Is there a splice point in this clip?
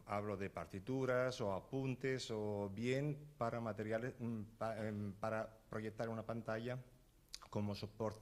yes; 1 cut; at 2.3 s

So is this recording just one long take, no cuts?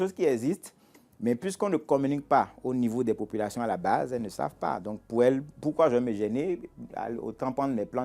yes; 0 cuts

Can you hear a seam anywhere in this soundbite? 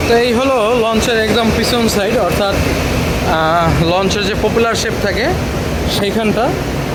no; 0 cuts

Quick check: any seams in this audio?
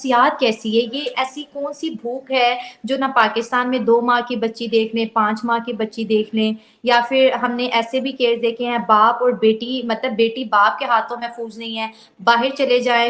no; 0 cuts

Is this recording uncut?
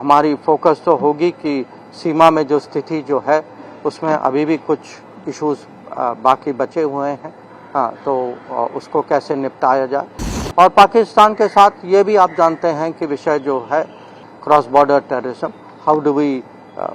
no; 1 cut; at 14.2 s

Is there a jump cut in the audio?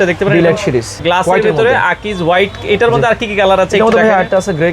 yes; 1 cut; at 0.9 s

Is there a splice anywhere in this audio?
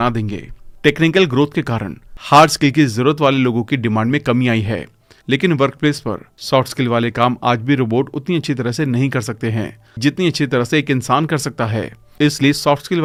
no; 0 cuts

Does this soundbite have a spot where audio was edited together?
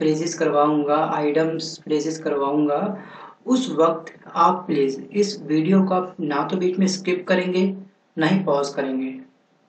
no; 0 cuts

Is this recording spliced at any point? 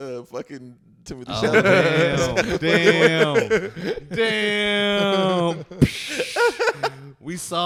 no; 0 cuts

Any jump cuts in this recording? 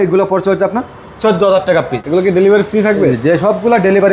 yes; 1 cut; at 1.9 s

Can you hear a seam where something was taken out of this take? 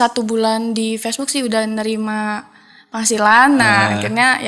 no; 0 cuts

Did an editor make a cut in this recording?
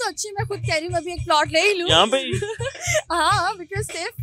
no; 0 cuts

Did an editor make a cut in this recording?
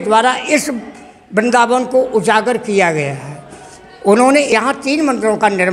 yes; 1 cut; at 4.5 s

